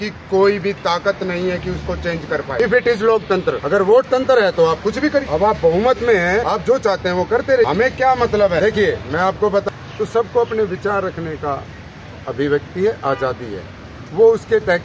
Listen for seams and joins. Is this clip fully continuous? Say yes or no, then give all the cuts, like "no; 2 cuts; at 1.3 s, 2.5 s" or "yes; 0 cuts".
no; 7 cuts; at 2.6 s, 3.6 s, 5.3 s, 6.5 s, 7.7 s, 8.6 s, 9.7 s